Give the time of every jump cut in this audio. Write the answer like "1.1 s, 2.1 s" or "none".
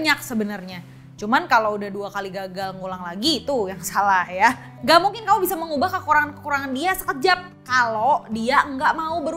4.7 s